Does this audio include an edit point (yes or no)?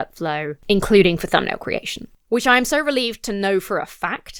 no